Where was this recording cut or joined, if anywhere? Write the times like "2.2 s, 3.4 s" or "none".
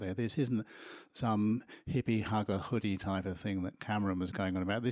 2.5 s